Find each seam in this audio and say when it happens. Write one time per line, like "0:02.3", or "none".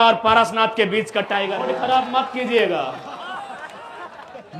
0:01.6